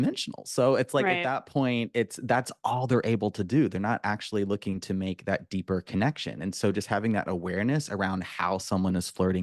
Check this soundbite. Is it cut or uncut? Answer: uncut